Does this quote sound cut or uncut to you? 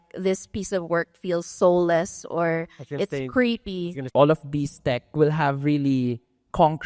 cut